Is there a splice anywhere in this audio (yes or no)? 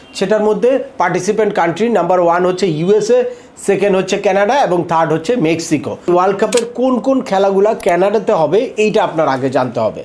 yes